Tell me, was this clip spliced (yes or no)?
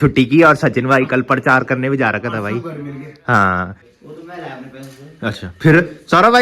yes